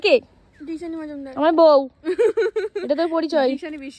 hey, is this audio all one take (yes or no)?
yes